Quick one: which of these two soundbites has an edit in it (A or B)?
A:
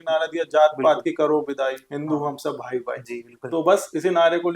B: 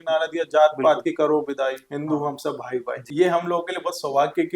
B